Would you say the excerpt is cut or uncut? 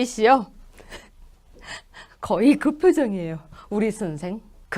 uncut